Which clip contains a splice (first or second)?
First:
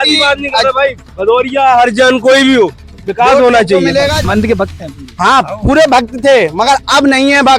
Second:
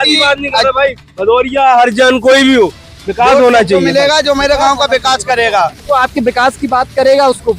first